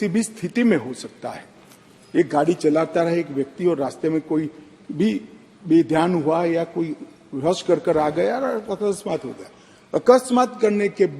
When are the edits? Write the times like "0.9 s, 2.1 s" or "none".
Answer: none